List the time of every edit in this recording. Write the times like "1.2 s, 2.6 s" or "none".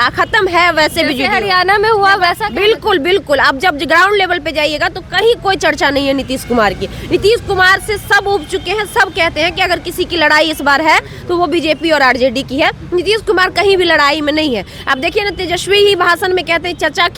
none